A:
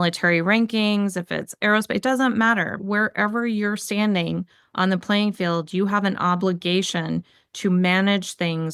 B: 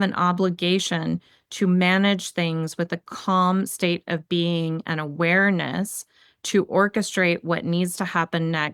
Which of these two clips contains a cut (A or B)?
A